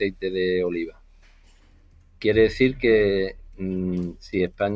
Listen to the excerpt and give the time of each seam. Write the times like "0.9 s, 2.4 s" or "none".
none